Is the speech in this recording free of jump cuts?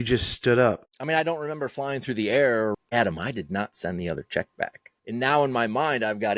no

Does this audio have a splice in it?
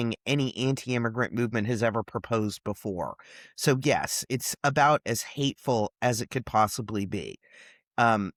no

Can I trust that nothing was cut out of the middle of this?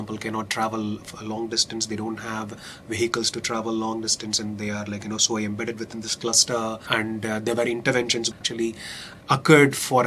no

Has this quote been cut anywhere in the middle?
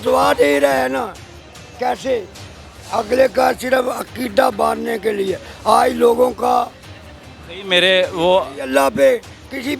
no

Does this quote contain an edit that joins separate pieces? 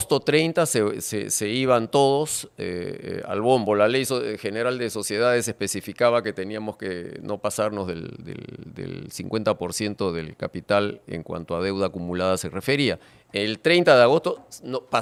no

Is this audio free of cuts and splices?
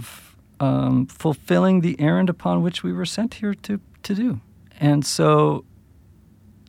yes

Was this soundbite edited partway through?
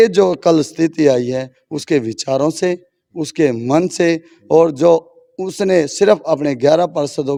no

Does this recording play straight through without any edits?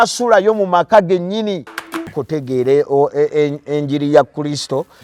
no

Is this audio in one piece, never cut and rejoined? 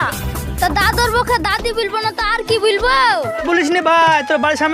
no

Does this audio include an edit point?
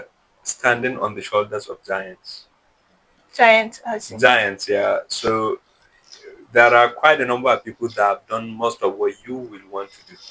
no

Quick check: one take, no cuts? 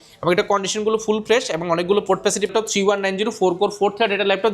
no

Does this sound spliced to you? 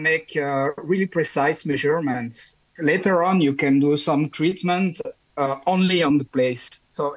yes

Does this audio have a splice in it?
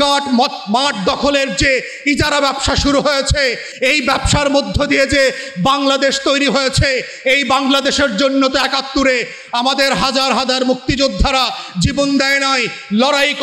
no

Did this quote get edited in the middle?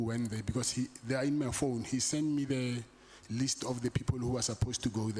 no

